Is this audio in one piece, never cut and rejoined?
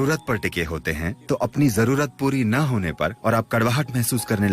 no; 2 cuts; at 1.1 s, 3.2 s

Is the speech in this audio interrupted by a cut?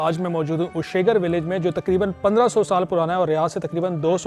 no; 0 cuts

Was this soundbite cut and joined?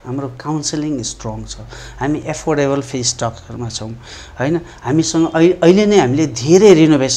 no; 0 cuts

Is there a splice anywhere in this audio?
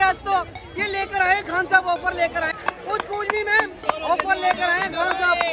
yes; 1 cut; at 2.5 s

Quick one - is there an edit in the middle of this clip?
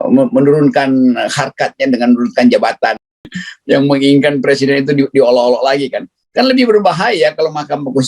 yes; 1 cut; at 3.5 s

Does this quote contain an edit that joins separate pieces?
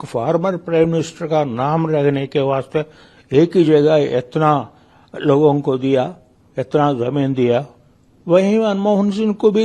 no; 0 cuts

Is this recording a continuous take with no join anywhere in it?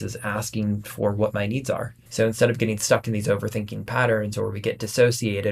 no; 1 cut; at 2.0 s

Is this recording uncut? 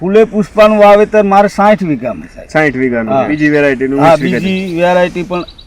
no; 1 cut; at 3.3 s

